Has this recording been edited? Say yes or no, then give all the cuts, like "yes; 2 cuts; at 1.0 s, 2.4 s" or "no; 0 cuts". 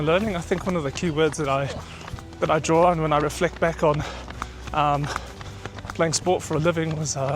no; 0 cuts